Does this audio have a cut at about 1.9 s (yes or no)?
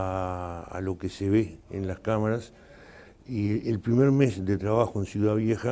yes